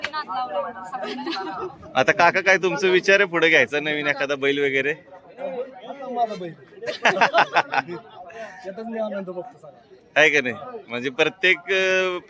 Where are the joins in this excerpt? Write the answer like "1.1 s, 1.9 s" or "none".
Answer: none